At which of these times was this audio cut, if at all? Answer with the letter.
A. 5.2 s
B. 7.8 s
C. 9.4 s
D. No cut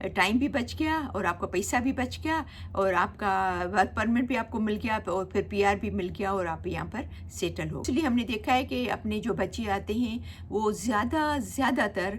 B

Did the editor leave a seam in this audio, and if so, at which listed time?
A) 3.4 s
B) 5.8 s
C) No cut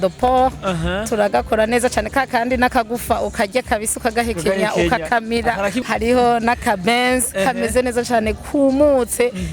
B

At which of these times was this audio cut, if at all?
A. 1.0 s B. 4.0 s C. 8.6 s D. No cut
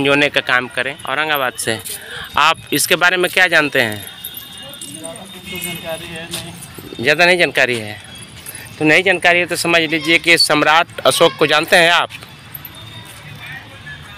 A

